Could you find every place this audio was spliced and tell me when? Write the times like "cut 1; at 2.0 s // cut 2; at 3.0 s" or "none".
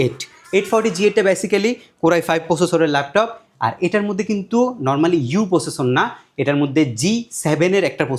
none